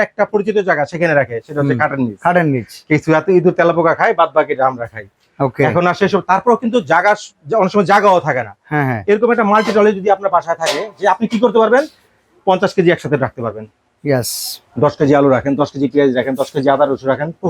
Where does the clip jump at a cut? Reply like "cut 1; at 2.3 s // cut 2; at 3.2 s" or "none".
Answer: none

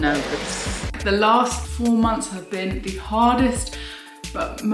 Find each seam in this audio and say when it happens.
cut 1; at 0.9 s // cut 2; at 1.6 s

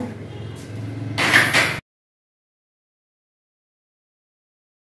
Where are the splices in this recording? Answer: none

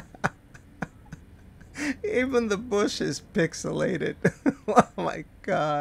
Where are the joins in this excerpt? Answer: none

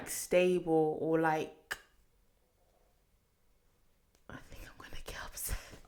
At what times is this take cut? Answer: none

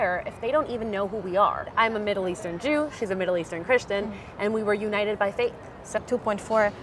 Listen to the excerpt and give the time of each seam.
cut 1; at 1.7 s // cut 2; at 6.0 s

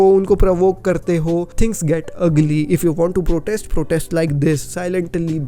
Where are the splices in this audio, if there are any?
none

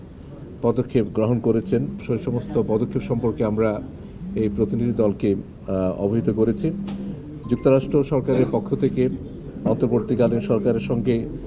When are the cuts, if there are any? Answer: cut 1; at 2.0 s

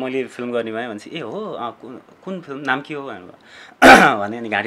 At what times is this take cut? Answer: none

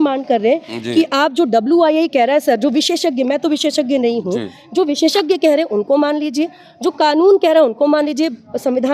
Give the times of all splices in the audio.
none

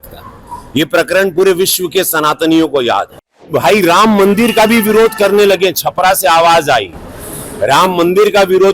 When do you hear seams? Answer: cut 1; at 3.5 s

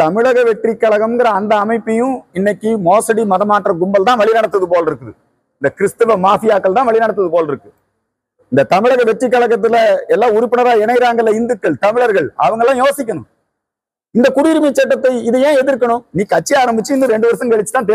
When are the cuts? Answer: none

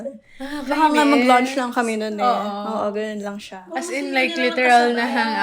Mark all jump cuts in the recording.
none

